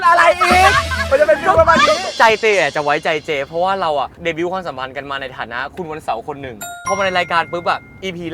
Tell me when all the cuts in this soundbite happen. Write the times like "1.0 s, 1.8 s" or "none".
2.0 s, 4.1 s, 6.8 s

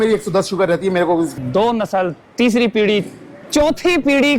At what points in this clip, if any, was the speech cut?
1.3 s

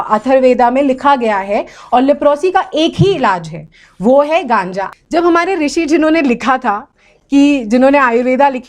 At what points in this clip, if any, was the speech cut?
4.8 s

